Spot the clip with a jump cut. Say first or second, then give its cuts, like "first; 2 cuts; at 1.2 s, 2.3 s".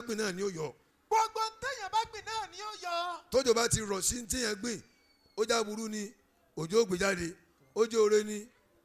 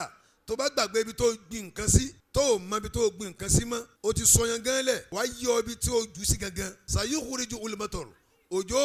second; 4 cuts; at 2.2 s, 3.9 s, 5.1 s, 6.8 s